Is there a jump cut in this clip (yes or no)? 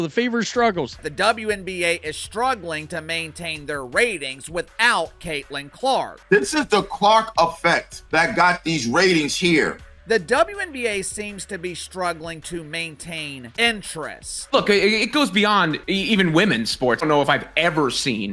yes